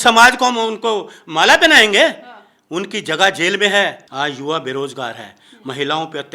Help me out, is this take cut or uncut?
cut